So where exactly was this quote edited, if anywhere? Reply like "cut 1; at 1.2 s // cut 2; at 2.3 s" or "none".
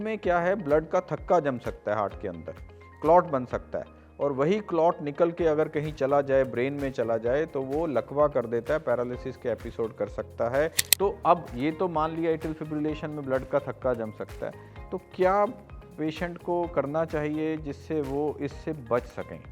cut 1; at 10.8 s